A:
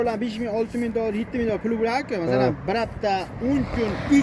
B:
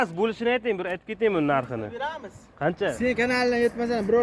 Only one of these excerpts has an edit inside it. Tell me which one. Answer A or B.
B